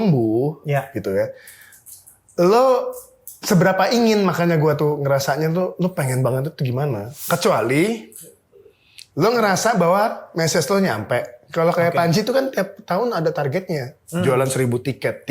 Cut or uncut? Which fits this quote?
cut